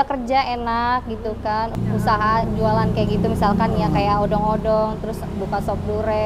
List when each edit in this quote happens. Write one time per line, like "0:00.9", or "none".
0:01.8